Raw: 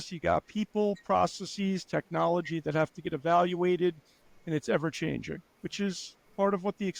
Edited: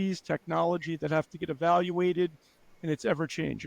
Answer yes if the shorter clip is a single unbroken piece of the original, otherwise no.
yes